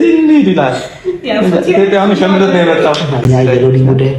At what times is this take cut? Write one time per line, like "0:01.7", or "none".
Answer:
none